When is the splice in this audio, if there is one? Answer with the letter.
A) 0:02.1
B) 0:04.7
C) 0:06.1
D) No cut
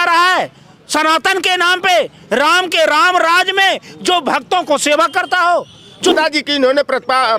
C